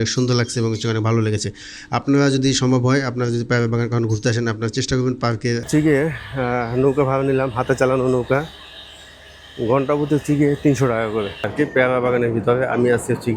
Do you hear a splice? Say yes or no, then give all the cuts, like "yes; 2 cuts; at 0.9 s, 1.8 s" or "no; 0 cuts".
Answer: yes; 2 cuts; at 5.7 s, 11.5 s